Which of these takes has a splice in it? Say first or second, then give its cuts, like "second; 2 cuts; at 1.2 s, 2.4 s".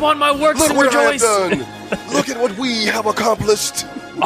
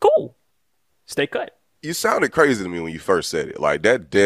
second; 1 cut; at 1.6 s